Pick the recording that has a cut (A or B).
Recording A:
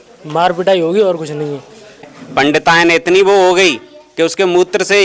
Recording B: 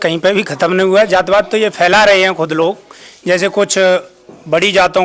A